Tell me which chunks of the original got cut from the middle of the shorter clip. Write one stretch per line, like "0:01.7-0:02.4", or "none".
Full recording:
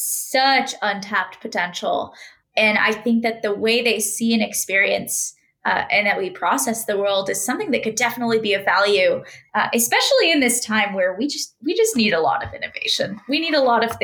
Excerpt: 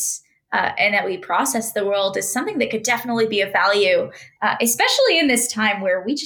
none

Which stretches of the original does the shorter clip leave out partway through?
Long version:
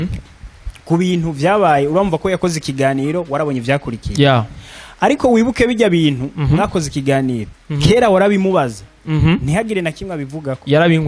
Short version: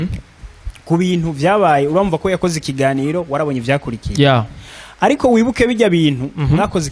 none

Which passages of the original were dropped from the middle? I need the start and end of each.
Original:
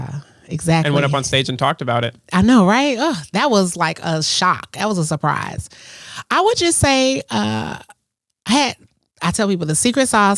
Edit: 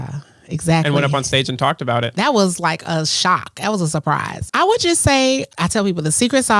0:02.1-0:03.3
0:05.5-0:06.1
0:07.2-0:09.1

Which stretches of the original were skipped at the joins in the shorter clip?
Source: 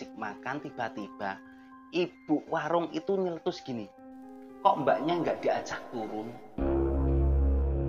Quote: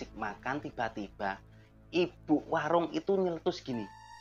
none

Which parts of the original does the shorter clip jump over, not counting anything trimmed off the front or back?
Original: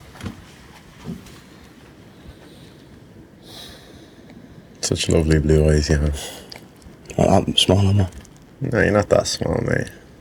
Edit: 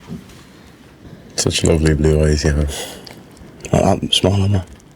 0:02.0-0:04.5

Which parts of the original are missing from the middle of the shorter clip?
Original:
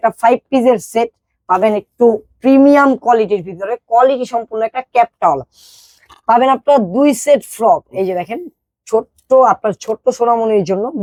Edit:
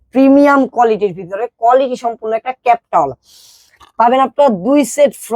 none

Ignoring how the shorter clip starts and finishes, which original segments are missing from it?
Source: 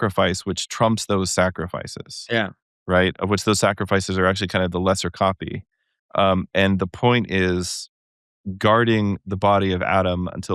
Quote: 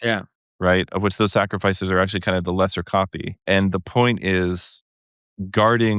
0:05.7-0:06.5

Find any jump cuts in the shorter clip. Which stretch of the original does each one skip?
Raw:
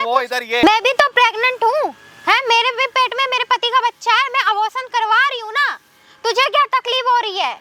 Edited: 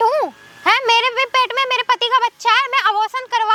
none

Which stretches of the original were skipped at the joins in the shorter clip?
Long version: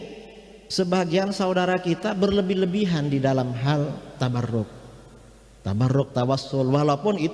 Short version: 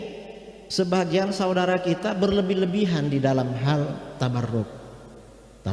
none

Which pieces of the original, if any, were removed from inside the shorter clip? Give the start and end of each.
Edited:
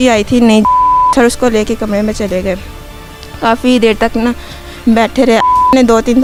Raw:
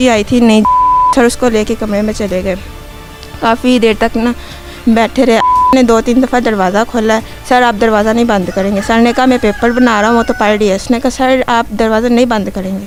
none

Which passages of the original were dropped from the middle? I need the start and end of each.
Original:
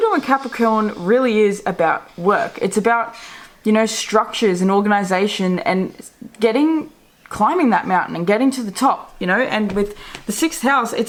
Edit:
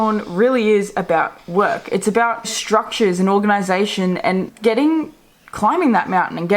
0:03.3-0:04.0
0:05.9-0:06.3

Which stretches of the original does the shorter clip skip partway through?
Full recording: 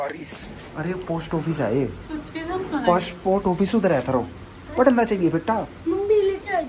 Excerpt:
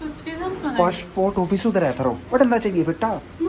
0:04.3-0:04.7

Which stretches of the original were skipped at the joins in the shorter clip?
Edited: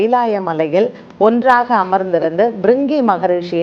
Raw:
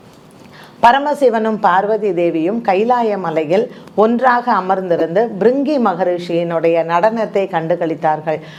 none

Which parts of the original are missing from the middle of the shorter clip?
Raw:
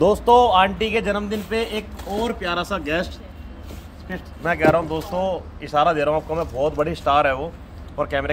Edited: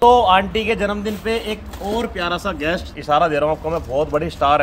0:03.2-0:05.6

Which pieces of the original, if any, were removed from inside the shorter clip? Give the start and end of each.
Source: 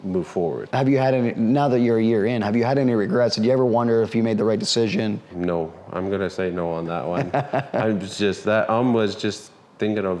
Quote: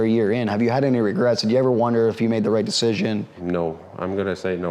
none

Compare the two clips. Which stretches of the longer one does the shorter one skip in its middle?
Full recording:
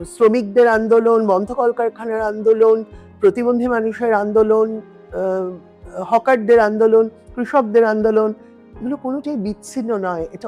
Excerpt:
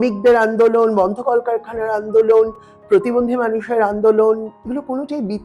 0:04.9-0:08.7

